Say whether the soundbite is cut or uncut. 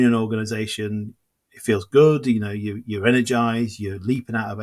cut